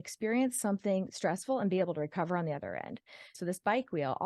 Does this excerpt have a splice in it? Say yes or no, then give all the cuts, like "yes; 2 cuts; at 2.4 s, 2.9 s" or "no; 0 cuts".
yes; 1 cut; at 3.3 s